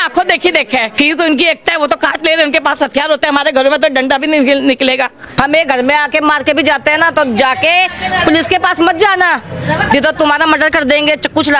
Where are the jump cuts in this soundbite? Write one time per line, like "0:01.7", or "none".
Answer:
0:00.9
0:05.3